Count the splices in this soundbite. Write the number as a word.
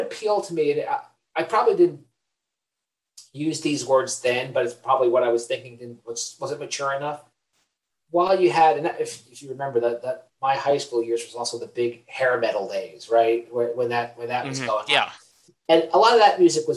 zero